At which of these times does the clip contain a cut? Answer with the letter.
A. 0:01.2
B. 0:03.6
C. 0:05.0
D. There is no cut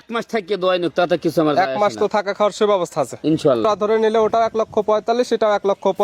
B